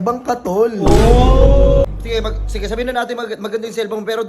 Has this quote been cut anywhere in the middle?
yes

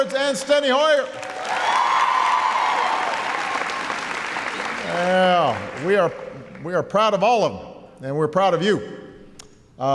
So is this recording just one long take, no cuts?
yes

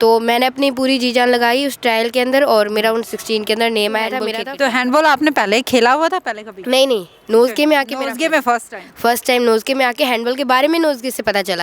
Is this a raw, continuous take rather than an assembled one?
no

